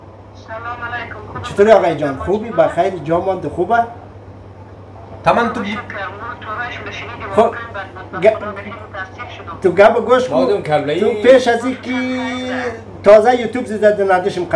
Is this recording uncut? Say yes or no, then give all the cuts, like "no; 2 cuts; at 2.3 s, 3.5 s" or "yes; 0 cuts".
yes; 0 cuts